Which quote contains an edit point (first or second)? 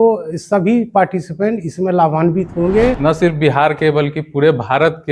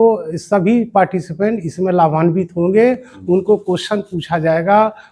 first